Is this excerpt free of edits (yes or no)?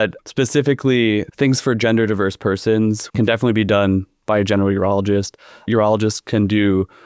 no